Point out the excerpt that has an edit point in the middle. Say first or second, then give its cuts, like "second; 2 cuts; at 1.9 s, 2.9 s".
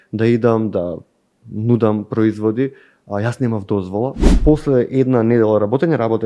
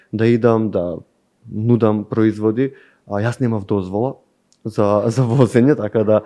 first; 1 cut; at 4.3 s